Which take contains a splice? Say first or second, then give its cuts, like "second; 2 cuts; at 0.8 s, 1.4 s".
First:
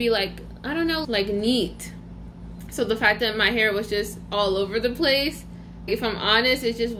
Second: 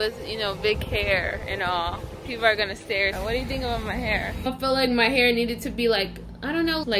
second; 2 cuts; at 3.2 s, 4.5 s